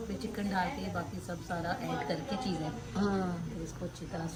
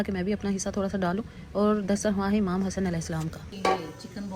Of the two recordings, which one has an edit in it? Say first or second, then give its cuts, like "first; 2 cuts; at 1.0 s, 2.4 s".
second; 1 cut; at 3.5 s